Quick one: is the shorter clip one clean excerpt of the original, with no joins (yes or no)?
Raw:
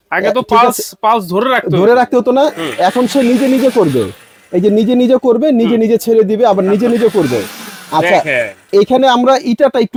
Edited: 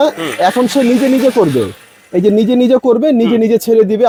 yes